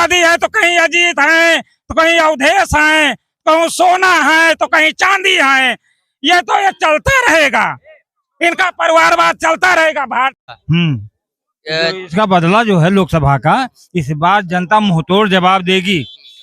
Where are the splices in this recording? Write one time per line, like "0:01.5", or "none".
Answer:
0:10.4